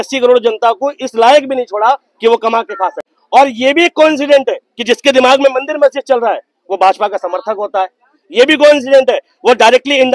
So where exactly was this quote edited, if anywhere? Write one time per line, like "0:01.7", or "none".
0:03.1